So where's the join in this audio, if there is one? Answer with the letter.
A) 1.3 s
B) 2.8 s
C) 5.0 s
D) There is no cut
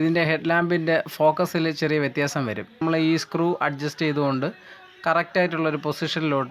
B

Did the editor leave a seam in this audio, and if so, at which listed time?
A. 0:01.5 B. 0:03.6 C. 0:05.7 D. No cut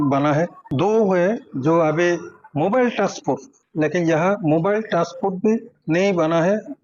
A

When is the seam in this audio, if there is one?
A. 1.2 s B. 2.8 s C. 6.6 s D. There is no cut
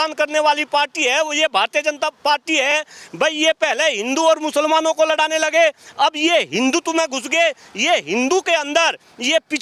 D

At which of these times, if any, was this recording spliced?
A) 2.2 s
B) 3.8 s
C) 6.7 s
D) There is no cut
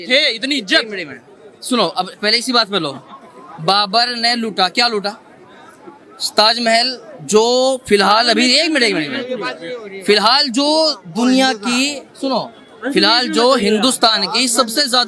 D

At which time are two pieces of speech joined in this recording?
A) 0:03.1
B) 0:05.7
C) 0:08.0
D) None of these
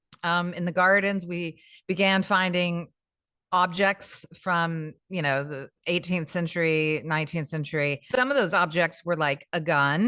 C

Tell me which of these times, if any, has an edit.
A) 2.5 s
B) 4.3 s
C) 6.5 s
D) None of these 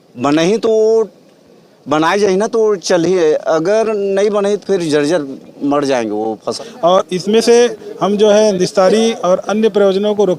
C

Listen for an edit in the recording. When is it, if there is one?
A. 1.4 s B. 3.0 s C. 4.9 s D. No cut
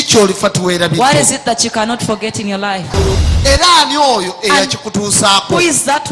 B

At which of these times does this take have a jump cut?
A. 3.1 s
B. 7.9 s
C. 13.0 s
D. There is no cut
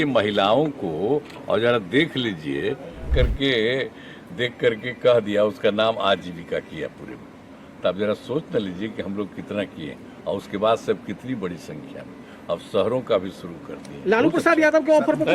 A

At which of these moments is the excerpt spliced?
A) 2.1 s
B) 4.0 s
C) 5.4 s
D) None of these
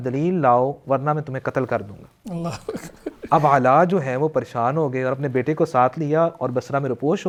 D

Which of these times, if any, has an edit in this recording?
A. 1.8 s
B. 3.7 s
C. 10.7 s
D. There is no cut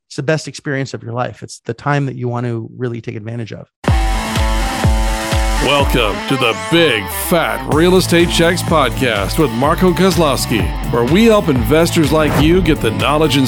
B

